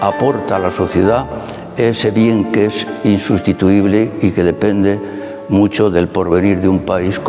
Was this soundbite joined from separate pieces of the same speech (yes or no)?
no